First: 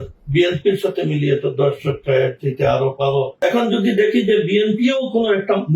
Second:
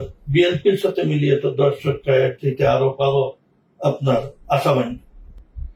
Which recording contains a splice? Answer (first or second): first